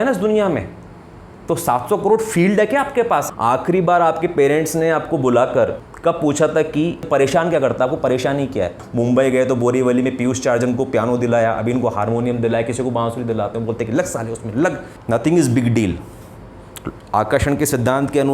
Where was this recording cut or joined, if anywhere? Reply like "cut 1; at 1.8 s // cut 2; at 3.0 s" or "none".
cut 1; at 3.3 s // cut 2; at 5.9 s // cut 3; at 7.1 s // cut 4; at 8.8 s // cut 5; at 14.9 s